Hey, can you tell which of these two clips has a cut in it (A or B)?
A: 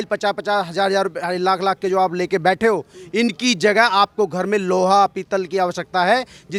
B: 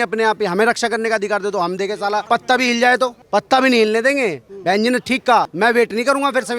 B